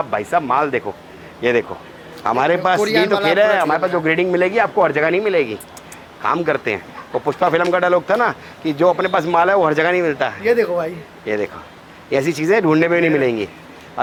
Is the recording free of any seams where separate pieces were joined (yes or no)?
yes